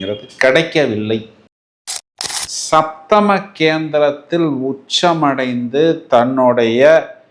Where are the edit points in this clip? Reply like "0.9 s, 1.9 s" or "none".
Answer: 2.0 s